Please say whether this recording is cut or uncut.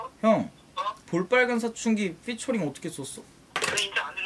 uncut